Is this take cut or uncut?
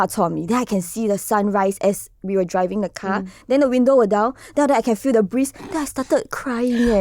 uncut